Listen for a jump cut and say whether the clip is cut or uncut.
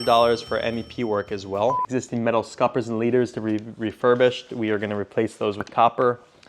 cut